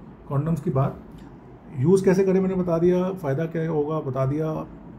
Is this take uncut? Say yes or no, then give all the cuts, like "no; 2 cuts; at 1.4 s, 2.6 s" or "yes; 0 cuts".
yes; 0 cuts